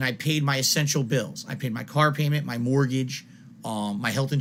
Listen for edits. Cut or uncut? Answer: uncut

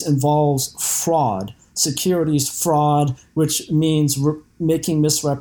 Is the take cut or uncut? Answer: uncut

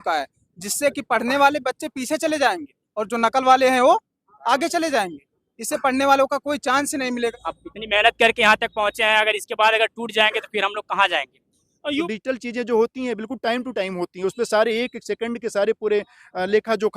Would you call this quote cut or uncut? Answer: cut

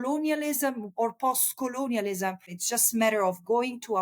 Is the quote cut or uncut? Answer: cut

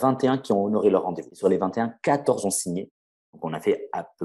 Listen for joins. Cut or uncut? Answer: cut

